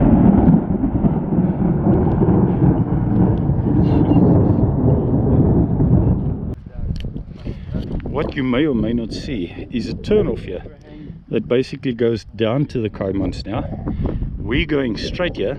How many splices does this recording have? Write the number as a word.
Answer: one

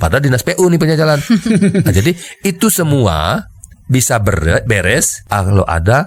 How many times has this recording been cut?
one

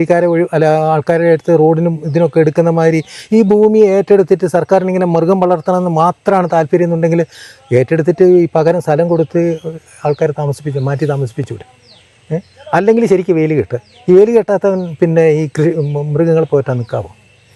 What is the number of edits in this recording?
zero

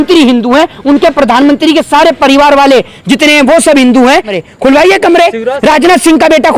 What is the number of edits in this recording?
one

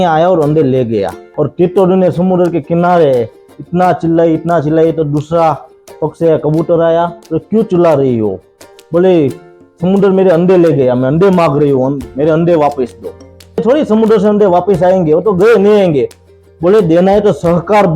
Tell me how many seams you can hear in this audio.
two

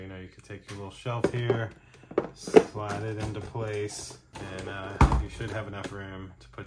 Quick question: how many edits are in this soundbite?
zero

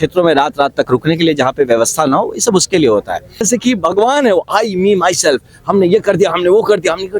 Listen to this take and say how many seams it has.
one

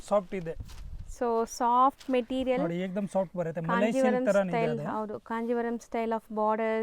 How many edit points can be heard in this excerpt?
zero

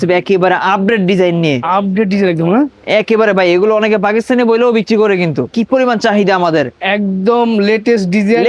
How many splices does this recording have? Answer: one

